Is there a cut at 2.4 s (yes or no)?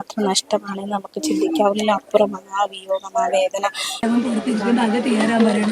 no